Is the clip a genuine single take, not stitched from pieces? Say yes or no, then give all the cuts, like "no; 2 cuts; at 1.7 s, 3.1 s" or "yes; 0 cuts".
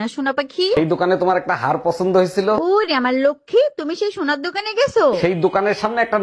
yes; 0 cuts